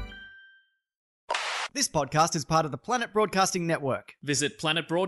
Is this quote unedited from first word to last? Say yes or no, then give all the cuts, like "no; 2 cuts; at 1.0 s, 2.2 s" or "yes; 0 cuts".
no; 1 cut; at 1.5 s